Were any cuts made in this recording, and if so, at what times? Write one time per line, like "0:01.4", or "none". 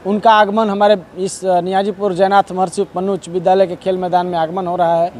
none